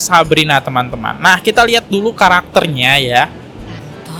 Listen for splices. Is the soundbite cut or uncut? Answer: uncut